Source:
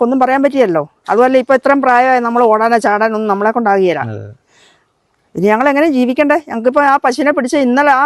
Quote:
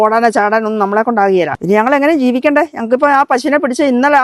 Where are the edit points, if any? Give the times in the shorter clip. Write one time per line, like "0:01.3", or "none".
0:01.6